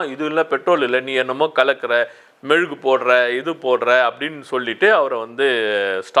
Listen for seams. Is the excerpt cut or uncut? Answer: uncut